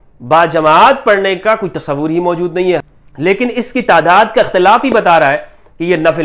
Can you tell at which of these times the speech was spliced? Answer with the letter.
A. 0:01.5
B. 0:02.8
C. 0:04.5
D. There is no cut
B